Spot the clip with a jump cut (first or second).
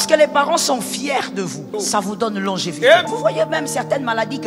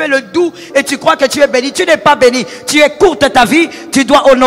first